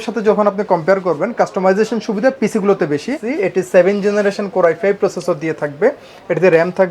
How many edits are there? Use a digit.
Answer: 1